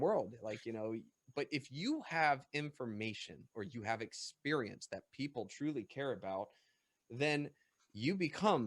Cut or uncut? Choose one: uncut